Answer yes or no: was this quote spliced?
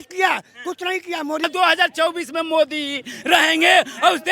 yes